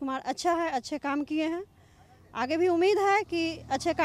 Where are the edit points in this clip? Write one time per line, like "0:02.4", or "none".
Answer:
none